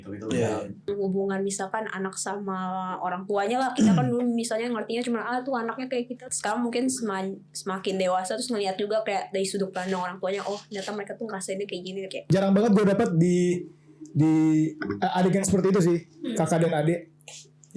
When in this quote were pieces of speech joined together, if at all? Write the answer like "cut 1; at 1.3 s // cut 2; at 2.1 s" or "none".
cut 1; at 0.9 s // cut 2; at 6.3 s // cut 3; at 12.3 s

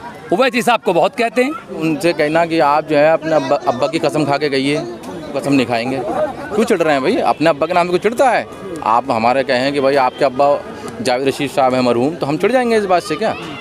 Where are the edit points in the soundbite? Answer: cut 1; at 1.8 s // cut 2; at 5.3 s // cut 3; at 6.5 s

